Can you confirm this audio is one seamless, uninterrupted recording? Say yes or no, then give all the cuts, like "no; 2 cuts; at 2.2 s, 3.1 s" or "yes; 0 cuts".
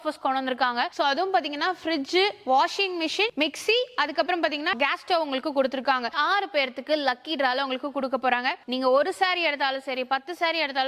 no; 3 cuts; at 4.7 s, 6.1 s, 8.6 s